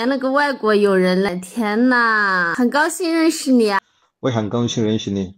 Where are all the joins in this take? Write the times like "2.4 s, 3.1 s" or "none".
1.3 s, 2.5 s, 3.8 s

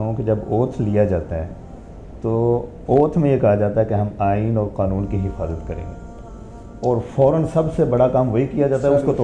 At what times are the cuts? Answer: none

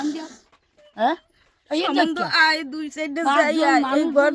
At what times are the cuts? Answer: none

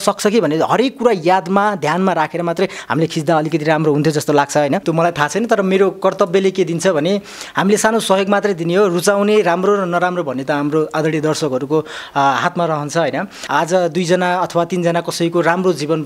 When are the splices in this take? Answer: 4.8 s, 7.4 s, 13.4 s

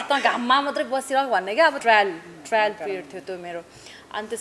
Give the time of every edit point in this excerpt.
1.8 s

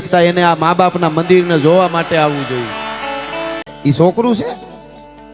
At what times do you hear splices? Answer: 3.7 s

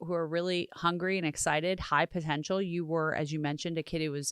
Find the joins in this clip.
none

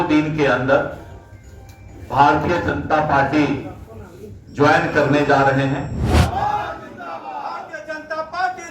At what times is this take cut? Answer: 6.0 s

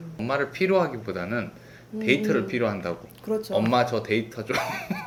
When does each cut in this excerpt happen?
none

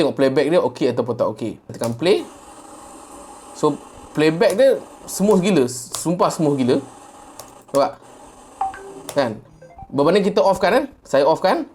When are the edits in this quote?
1.7 s

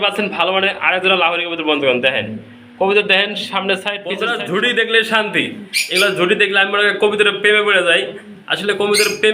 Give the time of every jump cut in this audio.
4.1 s

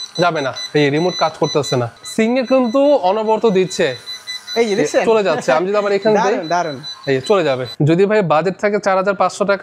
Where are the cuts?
2.0 s, 7.7 s

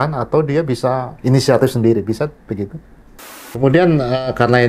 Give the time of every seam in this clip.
1.1 s, 3.4 s

